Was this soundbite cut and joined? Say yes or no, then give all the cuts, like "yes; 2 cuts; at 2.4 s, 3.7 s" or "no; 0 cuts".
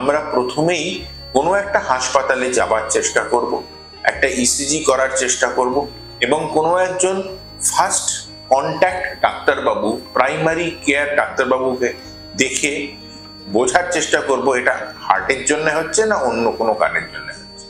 no; 0 cuts